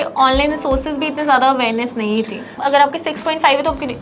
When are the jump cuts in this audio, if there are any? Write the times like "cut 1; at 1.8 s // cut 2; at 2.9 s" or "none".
cut 1; at 2.6 s